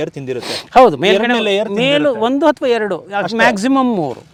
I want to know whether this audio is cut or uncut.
uncut